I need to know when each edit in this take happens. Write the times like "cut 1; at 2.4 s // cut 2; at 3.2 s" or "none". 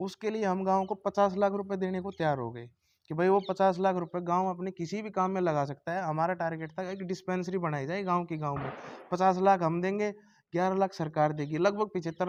none